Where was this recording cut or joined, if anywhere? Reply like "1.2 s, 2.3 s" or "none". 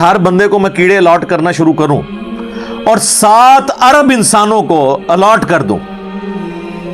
5.8 s